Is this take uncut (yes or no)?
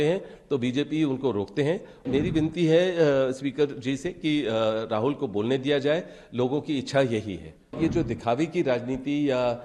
no